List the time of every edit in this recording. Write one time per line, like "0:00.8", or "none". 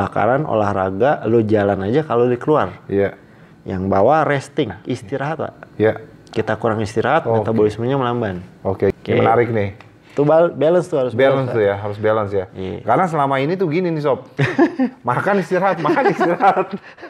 0:08.9

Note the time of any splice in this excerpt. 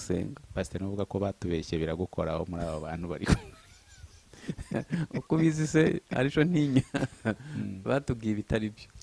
0:07.1

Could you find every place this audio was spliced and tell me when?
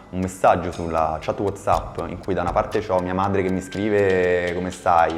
none

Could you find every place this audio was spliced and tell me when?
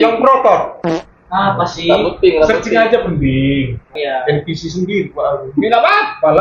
0:04.0

